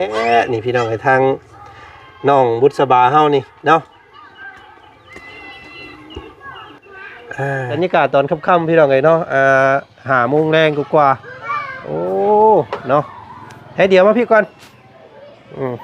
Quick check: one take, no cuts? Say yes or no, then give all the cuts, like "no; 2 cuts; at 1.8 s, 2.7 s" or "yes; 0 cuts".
no; 1 cut; at 7.8 s